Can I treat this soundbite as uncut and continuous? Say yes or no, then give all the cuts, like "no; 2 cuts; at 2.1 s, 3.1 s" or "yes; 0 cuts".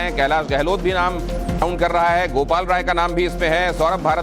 no; 1 cut; at 1.9 s